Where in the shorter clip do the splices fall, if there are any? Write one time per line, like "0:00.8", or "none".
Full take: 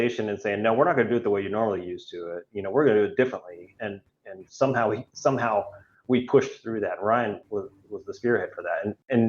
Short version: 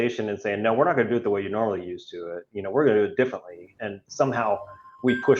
0:04.0